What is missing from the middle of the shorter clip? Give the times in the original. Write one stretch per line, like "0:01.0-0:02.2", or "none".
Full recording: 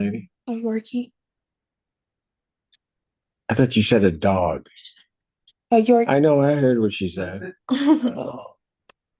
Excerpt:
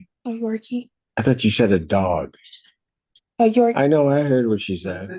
0:01.2-0:03.3